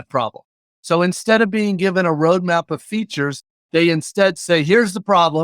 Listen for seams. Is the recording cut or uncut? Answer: cut